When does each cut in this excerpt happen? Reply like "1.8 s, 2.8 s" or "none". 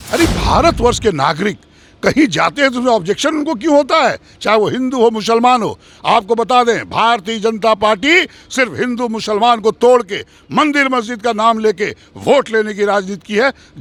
none